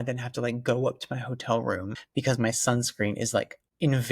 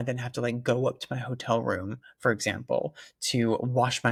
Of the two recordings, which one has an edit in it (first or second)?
first